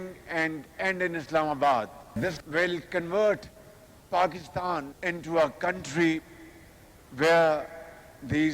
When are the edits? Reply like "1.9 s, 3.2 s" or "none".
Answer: 2.1 s, 5.0 s